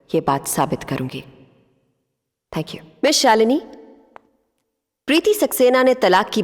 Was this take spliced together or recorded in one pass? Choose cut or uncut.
cut